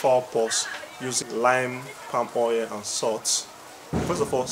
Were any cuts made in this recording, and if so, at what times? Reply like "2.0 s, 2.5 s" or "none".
1.2 s